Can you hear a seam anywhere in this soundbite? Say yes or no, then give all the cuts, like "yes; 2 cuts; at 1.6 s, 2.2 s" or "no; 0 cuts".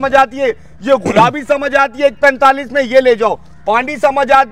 no; 0 cuts